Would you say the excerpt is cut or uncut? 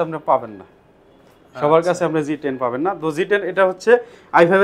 uncut